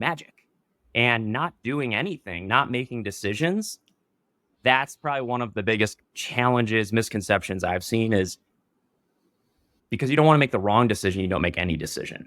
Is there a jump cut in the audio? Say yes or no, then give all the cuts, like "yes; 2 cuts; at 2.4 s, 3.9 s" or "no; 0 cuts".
yes; 2 cuts; at 6.0 s, 9.7 s